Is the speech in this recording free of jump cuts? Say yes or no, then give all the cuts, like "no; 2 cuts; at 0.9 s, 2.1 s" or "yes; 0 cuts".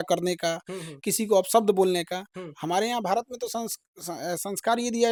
yes; 0 cuts